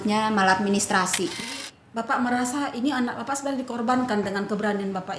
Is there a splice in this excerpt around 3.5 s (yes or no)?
no